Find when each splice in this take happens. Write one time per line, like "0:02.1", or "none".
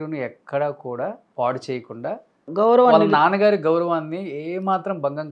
0:01.2
0:02.5